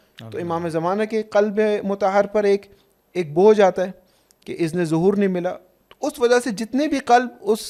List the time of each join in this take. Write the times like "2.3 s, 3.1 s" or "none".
none